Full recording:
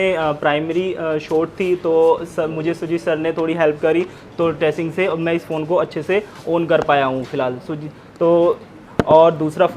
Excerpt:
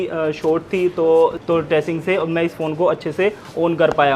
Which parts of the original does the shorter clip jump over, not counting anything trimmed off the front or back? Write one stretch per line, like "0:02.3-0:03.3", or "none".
0:02.3-0:04.3